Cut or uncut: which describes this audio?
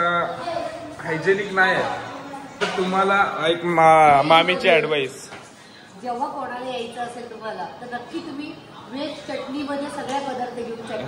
uncut